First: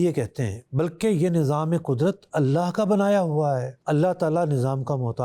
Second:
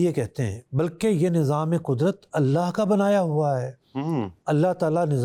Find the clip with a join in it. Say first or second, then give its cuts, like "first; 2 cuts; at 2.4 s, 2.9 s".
first; 1 cut; at 3.8 s